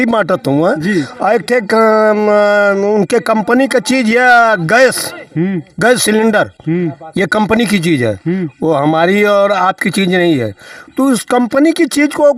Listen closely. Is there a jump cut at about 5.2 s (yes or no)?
no